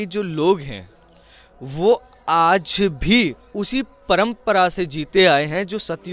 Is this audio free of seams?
yes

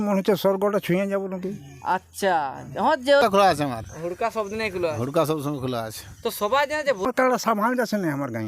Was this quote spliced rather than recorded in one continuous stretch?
yes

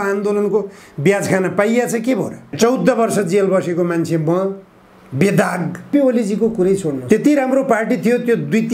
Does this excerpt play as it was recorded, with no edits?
no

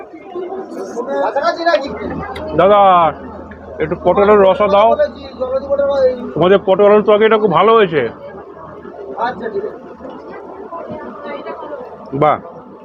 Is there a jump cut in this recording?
yes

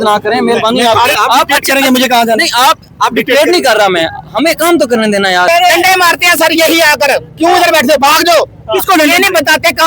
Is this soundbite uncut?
no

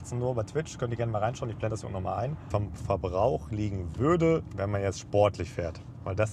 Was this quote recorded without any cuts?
no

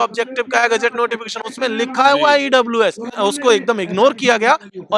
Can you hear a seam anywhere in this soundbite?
yes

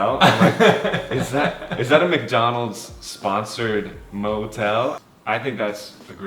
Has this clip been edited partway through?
yes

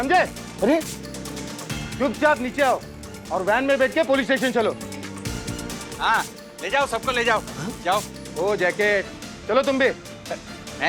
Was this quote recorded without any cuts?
yes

